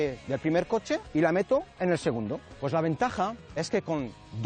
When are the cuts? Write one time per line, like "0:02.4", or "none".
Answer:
0:01.1
0:02.5